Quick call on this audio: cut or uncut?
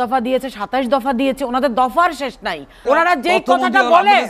cut